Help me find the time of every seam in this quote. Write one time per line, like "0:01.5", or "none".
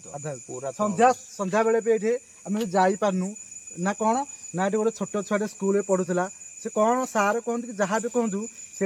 none